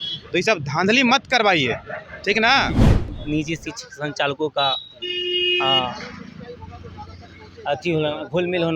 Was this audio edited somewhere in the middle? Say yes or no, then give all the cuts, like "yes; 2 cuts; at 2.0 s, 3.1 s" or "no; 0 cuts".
yes; 1 cut; at 3.0 s